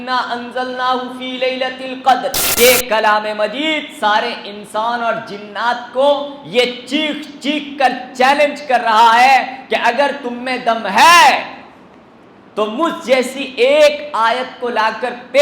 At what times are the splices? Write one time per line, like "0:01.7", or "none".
0:02.4